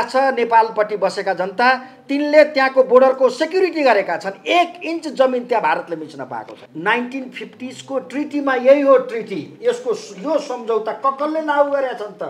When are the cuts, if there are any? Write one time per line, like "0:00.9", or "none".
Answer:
0:06.6